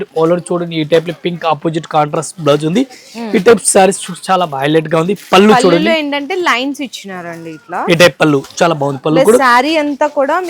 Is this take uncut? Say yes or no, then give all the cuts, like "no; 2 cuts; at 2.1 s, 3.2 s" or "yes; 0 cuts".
yes; 0 cuts